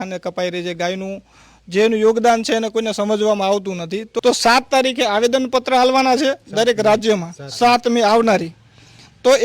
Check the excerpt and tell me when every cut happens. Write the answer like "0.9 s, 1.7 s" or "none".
4.1 s